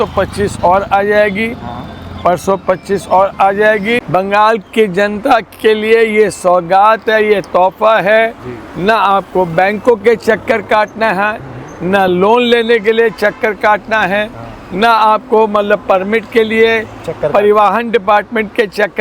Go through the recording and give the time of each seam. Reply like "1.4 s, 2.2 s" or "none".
4.0 s